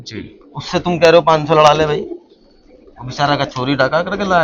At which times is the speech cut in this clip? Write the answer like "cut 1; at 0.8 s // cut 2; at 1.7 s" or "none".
none